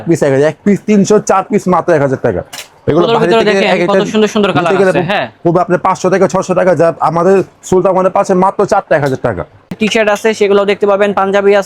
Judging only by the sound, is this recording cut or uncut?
cut